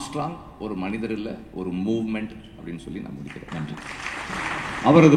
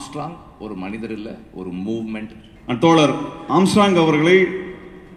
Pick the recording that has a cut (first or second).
second